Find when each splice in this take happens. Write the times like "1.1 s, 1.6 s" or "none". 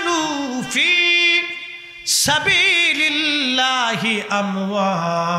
none